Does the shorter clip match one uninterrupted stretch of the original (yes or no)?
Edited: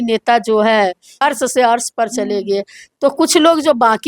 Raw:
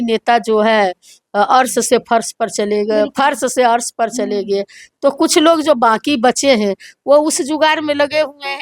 no